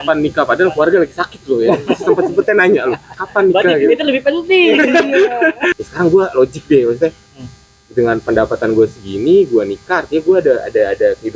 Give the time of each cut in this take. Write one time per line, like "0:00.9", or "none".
0:05.7